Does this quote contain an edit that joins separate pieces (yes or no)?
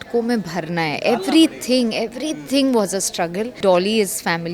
yes